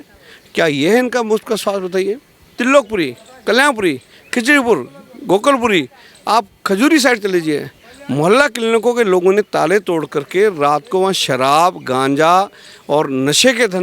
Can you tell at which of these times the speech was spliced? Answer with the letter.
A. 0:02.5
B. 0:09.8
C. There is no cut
A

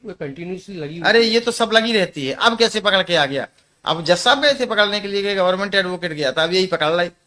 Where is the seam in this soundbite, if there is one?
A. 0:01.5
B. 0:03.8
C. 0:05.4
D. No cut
D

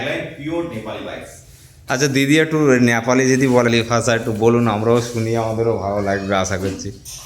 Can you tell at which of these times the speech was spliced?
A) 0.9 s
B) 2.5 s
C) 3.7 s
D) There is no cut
C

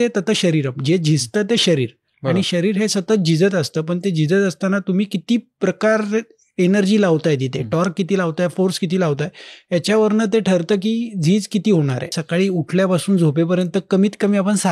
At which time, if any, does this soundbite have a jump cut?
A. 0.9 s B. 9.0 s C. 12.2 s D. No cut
C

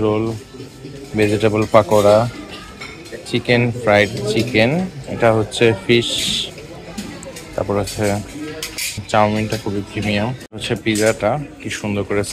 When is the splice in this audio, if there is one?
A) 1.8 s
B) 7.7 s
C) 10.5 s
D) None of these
C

